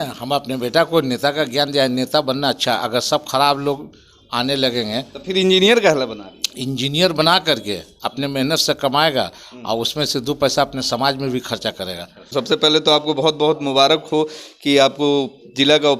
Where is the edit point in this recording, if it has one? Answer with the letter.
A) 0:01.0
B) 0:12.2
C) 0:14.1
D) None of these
B